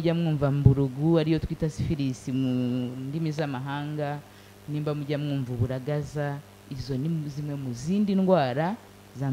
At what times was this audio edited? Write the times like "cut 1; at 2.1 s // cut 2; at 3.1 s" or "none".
none